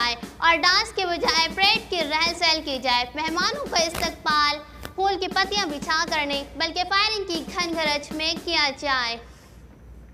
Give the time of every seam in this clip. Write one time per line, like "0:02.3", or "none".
none